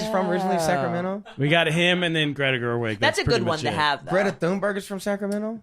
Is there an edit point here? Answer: yes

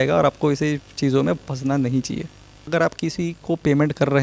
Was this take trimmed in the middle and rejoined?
yes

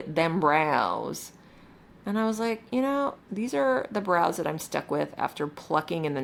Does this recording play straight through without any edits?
yes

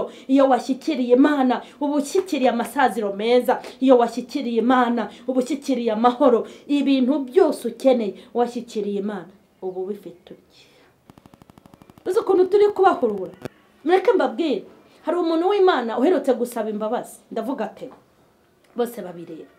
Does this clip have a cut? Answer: yes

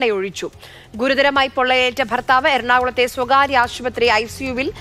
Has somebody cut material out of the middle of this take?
no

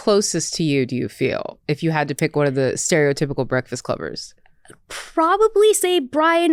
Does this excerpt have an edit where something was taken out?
no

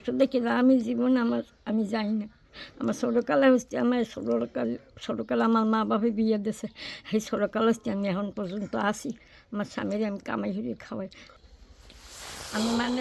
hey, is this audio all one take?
no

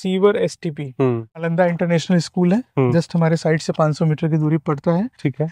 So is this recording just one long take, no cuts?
no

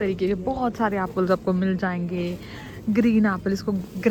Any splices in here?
no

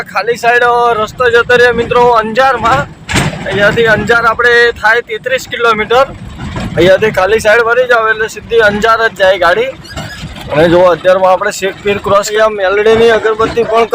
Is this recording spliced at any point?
yes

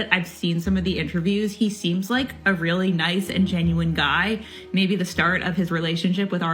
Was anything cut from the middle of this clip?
no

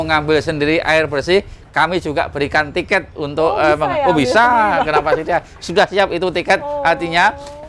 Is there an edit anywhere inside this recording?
no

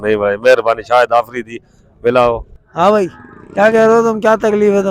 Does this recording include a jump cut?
yes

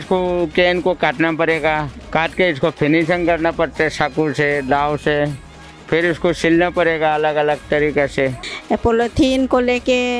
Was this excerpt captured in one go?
no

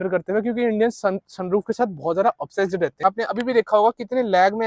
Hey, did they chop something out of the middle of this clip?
yes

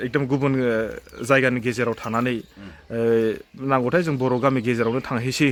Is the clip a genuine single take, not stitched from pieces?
yes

